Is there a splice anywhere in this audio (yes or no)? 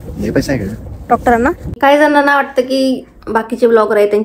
yes